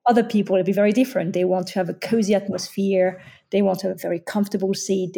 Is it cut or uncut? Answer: uncut